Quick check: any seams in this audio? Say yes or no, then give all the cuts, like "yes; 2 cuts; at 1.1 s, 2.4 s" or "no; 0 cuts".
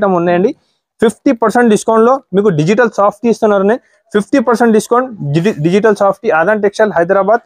no; 0 cuts